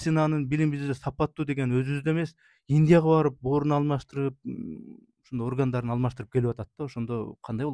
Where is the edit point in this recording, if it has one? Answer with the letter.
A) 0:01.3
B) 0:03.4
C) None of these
C